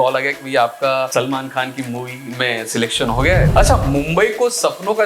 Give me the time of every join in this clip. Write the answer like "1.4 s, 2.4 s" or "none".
3.5 s